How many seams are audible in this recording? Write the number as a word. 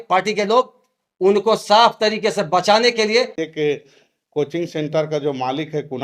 one